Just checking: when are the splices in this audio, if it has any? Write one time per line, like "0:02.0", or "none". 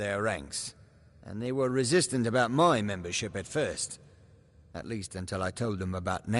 none